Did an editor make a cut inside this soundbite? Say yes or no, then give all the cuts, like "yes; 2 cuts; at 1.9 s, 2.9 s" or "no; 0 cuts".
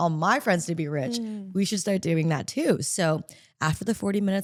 no; 0 cuts